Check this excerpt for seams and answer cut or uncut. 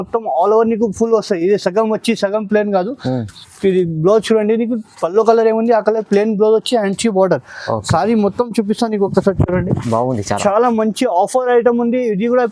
uncut